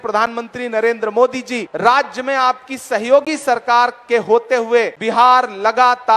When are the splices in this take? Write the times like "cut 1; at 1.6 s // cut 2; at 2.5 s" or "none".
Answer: cut 1; at 1.6 s // cut 2; at 5.0 s